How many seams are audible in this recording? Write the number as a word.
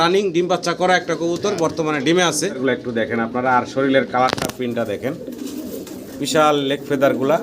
one